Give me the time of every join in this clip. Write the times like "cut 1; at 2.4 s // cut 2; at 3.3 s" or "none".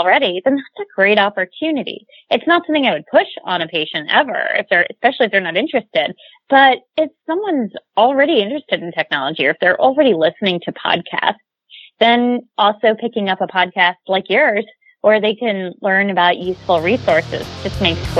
none